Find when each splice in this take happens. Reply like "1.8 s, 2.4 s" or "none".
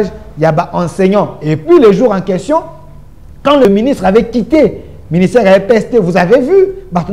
3.6 s